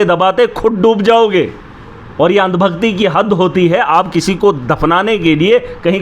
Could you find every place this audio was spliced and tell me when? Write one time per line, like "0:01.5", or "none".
none